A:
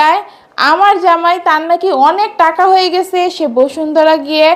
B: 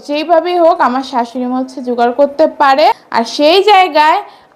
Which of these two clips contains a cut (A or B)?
B